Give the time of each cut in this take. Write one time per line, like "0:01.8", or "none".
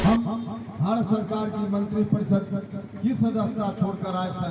none

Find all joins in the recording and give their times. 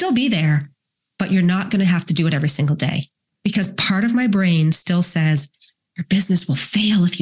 none

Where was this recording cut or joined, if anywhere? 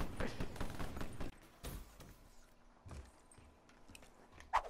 0:01.3

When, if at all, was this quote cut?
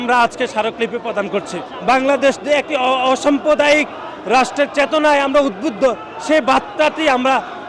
0:01.7

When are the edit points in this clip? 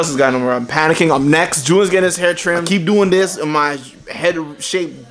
0:02.6

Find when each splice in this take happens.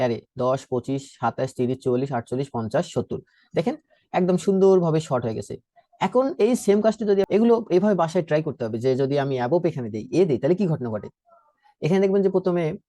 0:07.3

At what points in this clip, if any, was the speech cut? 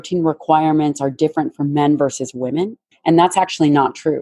0:02.8

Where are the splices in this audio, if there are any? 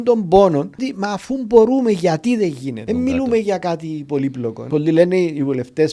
0:00.9
0:02.8
0:04.6

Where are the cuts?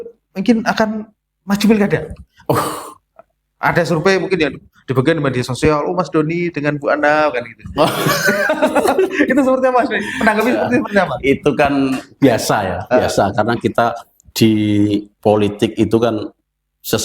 none

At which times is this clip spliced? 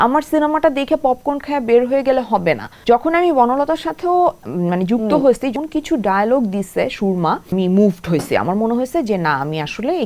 0:02.7
0:05.5
0:07.5

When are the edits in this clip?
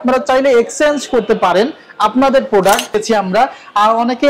0:03.0

